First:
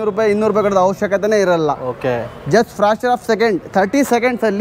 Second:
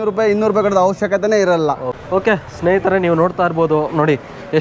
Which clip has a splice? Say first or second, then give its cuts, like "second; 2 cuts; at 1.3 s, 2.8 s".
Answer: second; 1 cut; at 1.9 s